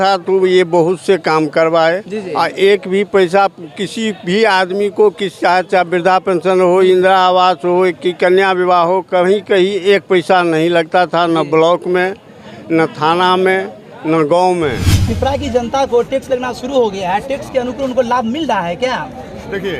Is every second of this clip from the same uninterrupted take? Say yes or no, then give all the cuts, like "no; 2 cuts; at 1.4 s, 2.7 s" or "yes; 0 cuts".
yes; 0 cuts